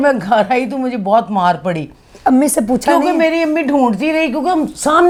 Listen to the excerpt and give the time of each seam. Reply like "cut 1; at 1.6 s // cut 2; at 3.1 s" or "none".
none